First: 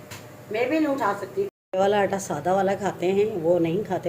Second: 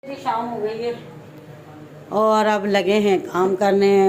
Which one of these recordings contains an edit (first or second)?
first